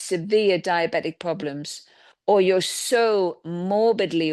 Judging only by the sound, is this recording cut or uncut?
uncut